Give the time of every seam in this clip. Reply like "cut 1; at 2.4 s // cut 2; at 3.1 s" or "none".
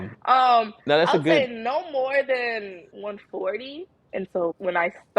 cut 1; at 2.8 s // cut 2; at 4.2 s